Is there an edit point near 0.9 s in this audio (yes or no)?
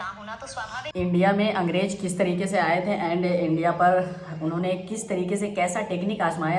yes